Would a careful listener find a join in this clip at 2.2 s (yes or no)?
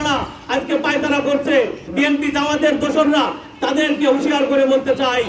no